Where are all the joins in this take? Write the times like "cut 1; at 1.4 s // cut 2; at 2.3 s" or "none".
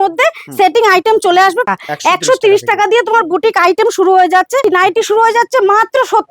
cut 1; at 1.7 s // cut 2; at 4.6 s